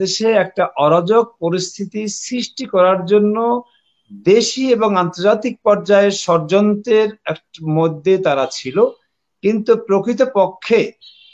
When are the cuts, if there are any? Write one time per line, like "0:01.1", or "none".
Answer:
none

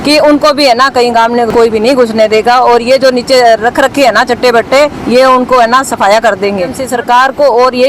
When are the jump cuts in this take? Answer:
0:06.8

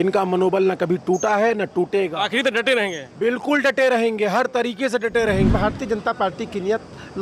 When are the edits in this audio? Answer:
0:05.5

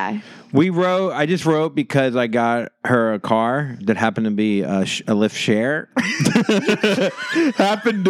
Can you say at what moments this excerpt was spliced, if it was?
none

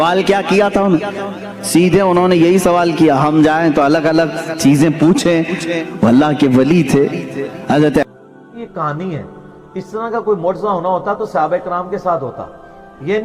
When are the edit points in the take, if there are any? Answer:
0:08.0

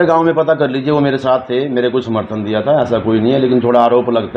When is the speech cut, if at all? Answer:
none

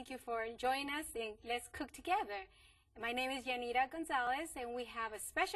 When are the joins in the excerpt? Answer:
0:04.4

